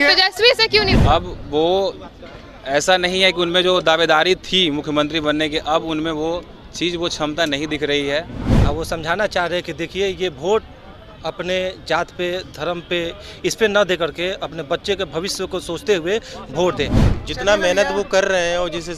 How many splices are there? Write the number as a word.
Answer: three